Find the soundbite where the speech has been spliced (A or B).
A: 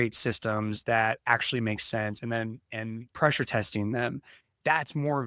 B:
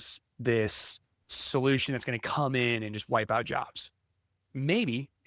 B